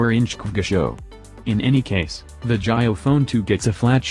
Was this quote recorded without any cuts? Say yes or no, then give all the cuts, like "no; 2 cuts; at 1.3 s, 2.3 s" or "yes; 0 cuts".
no; 2 cuts; at 1.3 s, 2.3 s